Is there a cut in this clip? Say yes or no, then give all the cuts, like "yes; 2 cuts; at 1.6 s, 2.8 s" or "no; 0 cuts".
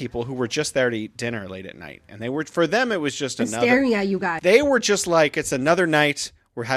yes; 1 cut; at 4.3 s